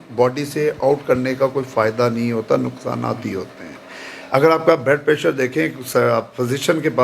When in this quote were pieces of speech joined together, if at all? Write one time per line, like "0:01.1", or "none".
none